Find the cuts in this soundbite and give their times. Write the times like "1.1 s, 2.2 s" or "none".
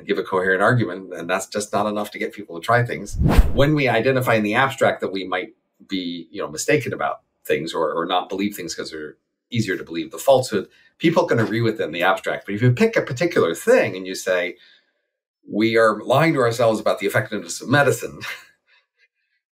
3.4 s, 9.4 s